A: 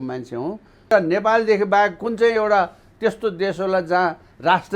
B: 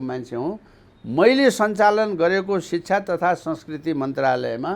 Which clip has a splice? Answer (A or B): A